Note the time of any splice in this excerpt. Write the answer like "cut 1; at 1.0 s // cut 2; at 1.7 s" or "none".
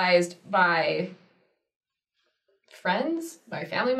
none

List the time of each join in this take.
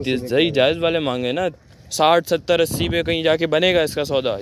cut 1; at 1.6 s

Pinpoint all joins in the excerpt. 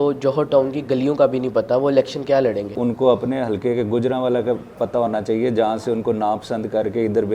cut 1; at 2.8 s

